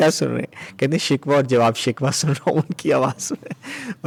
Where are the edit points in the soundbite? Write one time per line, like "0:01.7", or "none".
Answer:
none